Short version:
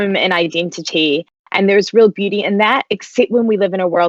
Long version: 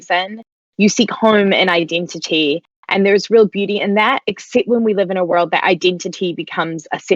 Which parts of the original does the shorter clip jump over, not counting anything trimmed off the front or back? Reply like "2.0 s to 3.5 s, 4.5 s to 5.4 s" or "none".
none